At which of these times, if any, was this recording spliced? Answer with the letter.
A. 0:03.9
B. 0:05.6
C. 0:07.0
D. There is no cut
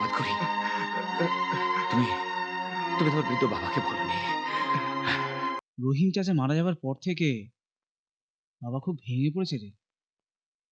B